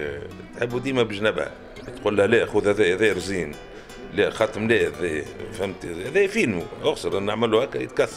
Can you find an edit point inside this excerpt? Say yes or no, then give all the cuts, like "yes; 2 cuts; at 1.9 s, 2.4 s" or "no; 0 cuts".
yes; 1 cut; at 1.9 s